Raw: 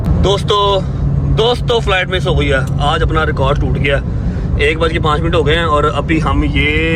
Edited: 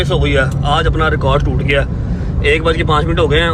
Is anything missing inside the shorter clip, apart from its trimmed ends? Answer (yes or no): no